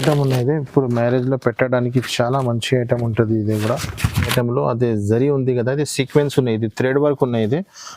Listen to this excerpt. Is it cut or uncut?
cut